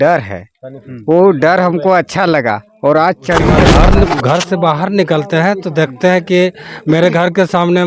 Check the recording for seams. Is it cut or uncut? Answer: cut